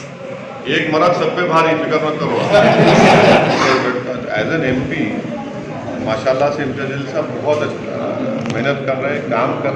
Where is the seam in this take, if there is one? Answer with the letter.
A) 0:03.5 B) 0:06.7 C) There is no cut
A